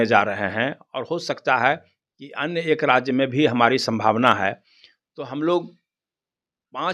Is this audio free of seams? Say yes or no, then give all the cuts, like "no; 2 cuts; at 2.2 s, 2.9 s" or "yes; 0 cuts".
yes; 0 cuts